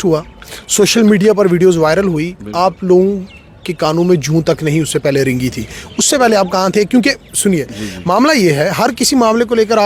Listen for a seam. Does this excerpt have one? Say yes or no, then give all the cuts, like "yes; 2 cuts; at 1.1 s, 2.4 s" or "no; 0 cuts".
no; 0 cuts